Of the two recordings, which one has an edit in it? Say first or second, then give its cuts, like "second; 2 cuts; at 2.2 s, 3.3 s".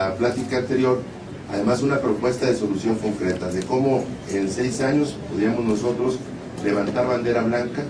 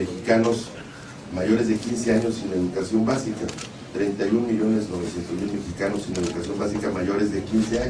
second; 1 cut; at 5.3 s